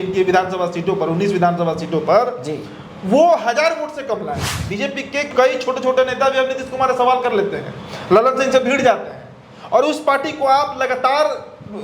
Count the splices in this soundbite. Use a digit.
1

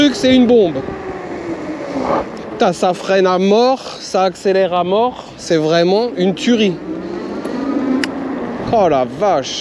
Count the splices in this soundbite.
0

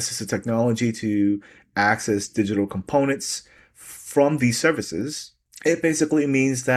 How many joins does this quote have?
0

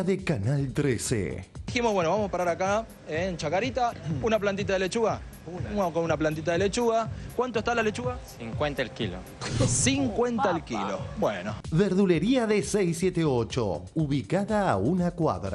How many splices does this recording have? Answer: 2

